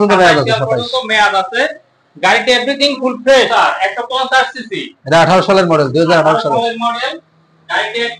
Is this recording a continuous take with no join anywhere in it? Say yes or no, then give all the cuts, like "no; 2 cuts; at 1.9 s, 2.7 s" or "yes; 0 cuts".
no; 1 cut; at 3.5 s